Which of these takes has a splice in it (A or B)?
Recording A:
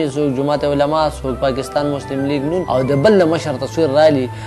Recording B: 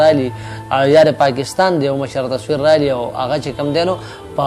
A